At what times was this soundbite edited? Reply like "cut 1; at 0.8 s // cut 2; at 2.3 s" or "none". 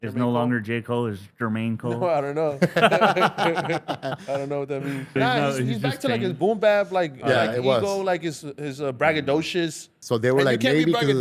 cut 1; at 5.1 s // cut 2; at 9.9 s